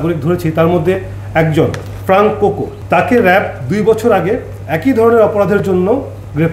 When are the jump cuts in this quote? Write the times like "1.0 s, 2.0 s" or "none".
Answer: 2.7 s